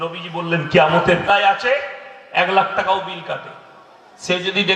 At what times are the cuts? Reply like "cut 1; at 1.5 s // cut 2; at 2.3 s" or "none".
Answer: cut 1; at 1.2 s